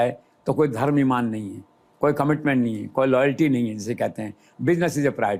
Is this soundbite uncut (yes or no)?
yes